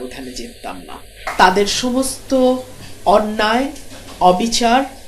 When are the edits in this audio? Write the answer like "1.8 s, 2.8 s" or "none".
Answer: 1.2 s